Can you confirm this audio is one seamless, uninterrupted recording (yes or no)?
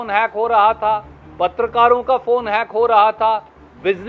yes